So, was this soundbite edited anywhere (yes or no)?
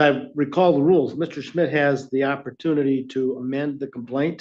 no